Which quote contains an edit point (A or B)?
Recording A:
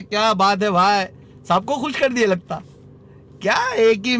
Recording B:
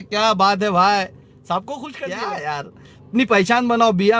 B